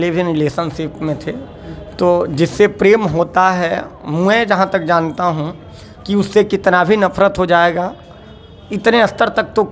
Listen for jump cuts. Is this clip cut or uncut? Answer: uncut